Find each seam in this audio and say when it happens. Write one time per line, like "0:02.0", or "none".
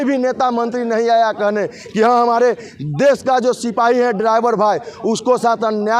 none